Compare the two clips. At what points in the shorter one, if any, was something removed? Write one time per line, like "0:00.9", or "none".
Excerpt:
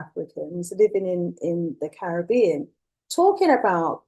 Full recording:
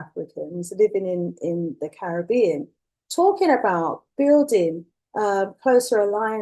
none